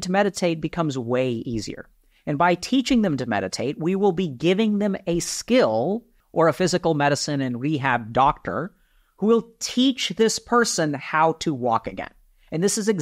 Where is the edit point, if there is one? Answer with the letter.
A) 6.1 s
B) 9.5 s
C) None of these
A